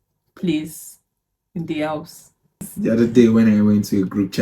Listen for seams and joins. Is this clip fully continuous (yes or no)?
no